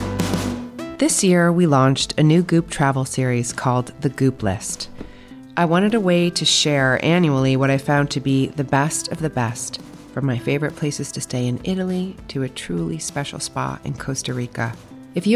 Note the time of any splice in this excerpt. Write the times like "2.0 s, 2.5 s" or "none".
0.9 s